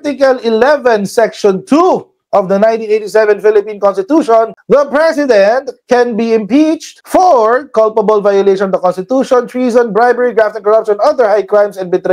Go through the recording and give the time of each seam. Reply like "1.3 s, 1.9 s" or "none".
none